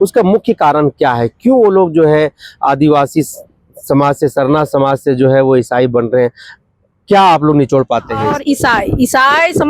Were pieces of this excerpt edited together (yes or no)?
yes